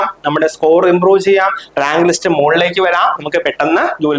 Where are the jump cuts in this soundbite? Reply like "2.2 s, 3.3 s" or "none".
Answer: none